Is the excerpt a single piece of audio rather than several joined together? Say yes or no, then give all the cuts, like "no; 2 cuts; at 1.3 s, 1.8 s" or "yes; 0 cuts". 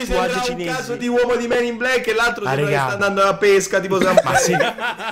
yes; 0 cuts